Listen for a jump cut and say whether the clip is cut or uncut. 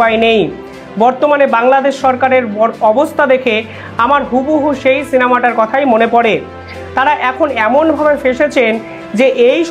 uncut